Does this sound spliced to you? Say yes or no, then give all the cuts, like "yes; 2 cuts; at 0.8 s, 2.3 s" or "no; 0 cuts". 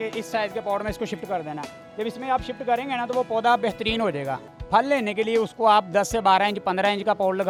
no; 0 cuts